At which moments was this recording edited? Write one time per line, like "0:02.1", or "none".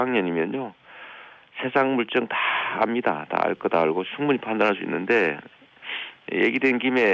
0:02.4